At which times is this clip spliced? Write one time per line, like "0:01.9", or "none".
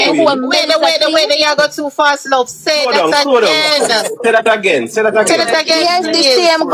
none